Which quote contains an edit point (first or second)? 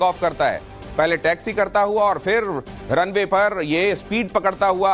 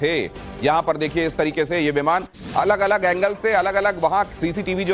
second